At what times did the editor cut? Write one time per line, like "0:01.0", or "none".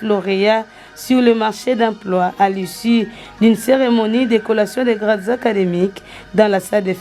none